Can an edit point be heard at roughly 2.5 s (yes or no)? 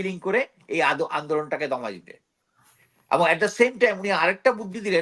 no